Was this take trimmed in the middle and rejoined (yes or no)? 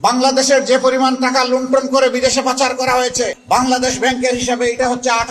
yes